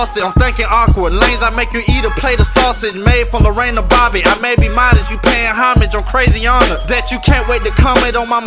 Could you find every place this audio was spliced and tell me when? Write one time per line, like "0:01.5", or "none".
0:07.0

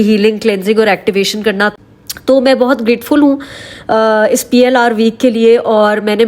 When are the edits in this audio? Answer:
0:01.7

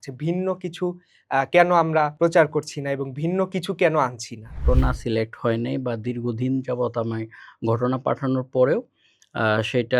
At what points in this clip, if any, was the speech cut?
0:02.1
0:04.6

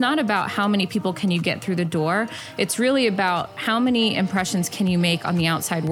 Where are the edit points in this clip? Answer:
none

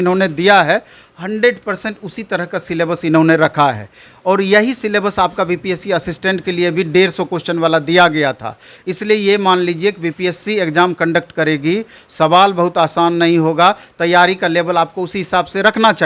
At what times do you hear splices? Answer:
none

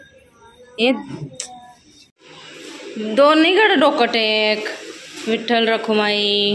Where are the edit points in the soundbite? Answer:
0:02.3

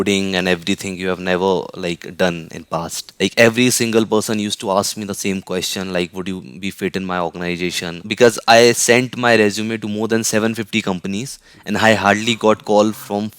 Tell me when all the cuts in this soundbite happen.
0:03.0
0:08.0

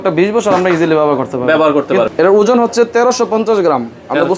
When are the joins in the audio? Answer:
0:02.1

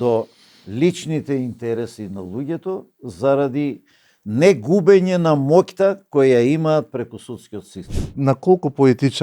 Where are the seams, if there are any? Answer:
0:08.1

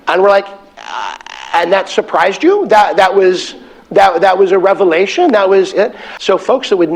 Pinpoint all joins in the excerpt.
0:06.1

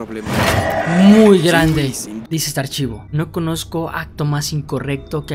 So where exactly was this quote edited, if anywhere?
0:02.2

